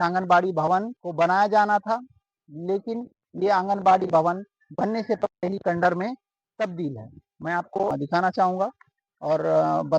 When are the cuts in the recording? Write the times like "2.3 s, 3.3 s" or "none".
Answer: none